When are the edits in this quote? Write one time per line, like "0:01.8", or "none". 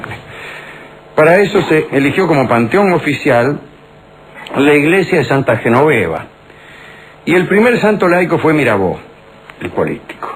0:08.5

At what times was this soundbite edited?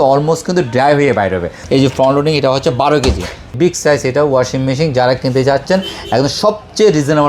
0:01.6
0:03.5

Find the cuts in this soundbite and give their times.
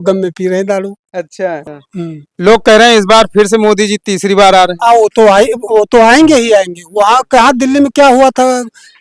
0:01.6

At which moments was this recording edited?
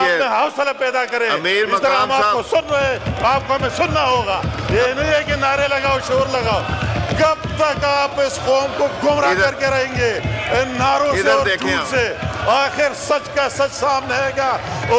none

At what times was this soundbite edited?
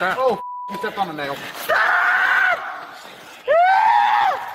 none

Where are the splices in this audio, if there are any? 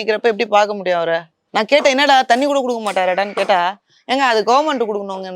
0:01.4

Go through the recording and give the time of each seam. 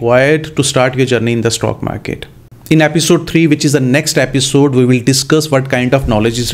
none

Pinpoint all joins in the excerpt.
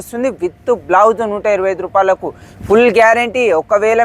none

